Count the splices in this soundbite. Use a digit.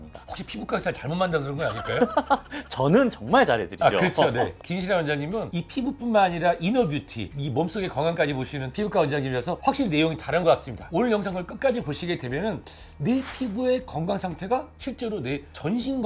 1